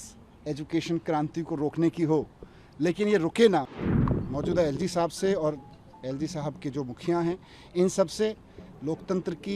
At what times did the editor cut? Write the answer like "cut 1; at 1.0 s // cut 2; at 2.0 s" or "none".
cut 1; at 4.0 s